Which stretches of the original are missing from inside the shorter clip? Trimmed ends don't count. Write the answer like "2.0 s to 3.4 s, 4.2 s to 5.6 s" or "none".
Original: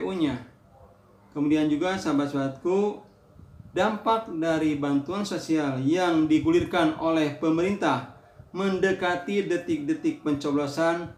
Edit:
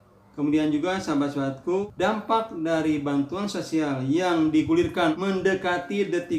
2.8 s to 3.6 s, 6.9 s to 8.6 s